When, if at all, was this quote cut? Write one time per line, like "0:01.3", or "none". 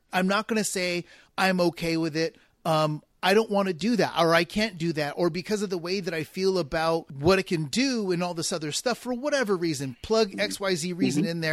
0:07.1